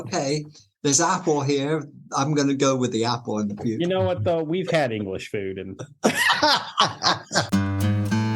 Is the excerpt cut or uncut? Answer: cut